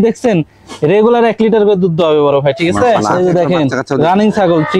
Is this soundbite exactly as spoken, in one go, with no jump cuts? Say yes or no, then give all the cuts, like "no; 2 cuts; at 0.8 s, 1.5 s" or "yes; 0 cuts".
no; 1 cut; at 3.1 s